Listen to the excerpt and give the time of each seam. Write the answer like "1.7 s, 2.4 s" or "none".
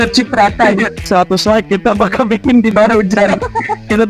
1.0 s

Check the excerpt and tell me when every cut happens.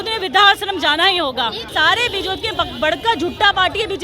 1.7 s

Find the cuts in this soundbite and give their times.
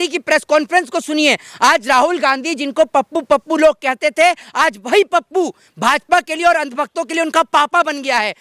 none

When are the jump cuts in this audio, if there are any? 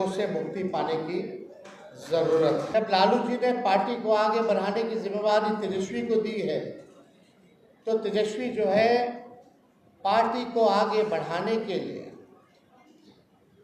2.7 s

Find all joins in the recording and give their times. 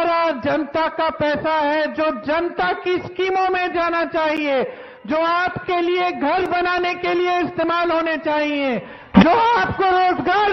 none

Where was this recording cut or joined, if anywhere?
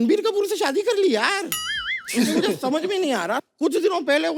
none

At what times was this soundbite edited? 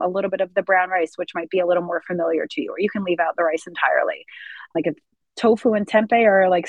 4.7 s

